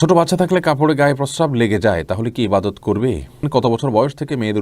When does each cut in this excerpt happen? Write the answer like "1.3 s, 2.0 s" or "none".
3.5 s